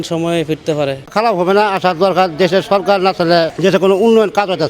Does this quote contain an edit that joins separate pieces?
no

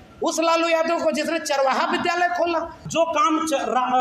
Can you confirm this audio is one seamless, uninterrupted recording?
no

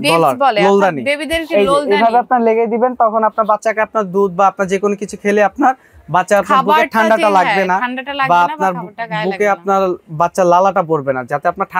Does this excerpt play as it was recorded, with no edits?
yes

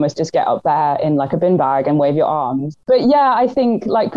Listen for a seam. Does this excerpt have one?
yes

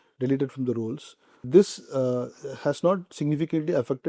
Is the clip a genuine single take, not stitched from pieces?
no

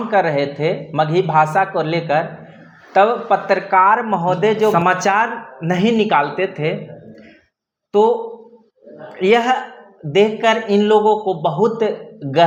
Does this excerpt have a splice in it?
no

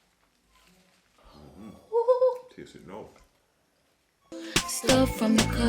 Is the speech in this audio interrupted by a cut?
yes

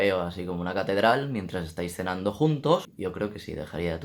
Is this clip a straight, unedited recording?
no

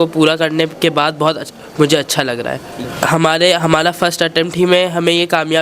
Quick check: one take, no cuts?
no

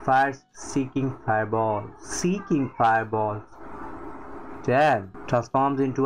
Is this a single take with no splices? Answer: no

